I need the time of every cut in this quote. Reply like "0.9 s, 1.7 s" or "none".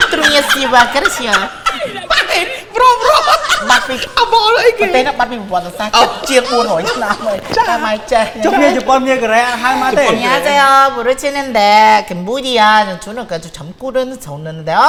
none